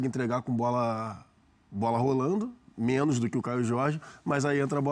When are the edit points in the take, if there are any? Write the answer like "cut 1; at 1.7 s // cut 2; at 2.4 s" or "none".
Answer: none